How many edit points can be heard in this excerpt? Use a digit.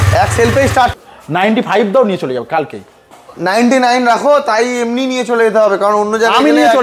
1